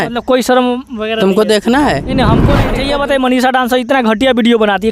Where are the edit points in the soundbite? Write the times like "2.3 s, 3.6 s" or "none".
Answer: 2.6 s